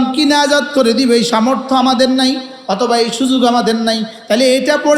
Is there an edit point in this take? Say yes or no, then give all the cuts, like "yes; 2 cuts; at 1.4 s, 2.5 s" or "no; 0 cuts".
no; 0 cuts